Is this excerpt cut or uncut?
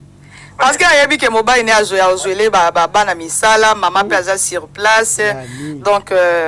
uncut